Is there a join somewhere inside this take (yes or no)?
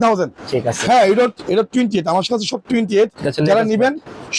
no